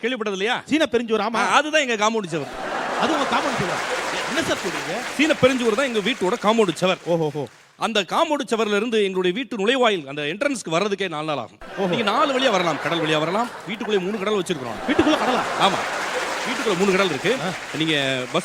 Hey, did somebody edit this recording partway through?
no; 0 cuts

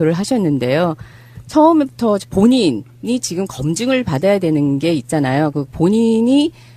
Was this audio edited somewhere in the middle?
no; 0 cuts

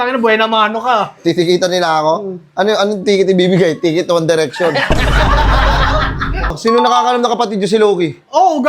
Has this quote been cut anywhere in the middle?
yes; 1 cut; at 6.6 s

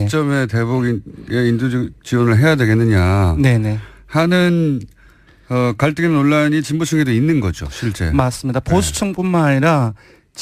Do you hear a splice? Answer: no; 0 cuts

